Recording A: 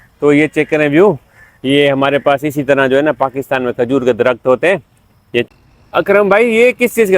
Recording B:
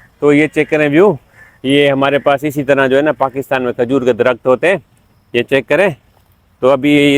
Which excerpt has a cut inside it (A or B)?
A